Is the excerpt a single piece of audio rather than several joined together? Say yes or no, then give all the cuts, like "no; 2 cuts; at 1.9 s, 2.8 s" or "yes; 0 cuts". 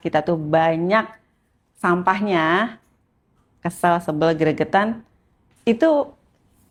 yes; 0 cuts